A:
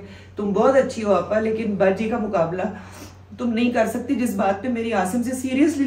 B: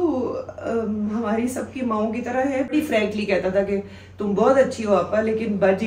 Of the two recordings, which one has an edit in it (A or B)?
B